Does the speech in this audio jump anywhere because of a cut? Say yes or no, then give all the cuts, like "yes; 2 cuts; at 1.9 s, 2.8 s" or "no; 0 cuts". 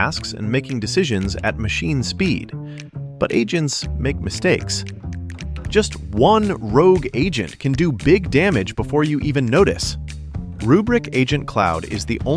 no; 0 cuts